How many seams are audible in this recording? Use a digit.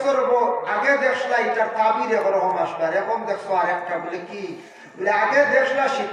0